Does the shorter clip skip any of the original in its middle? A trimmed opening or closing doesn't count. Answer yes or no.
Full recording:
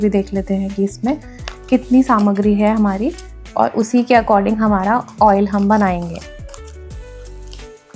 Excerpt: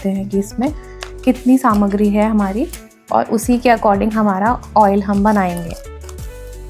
yes